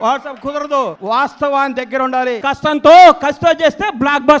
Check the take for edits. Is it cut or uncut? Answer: cut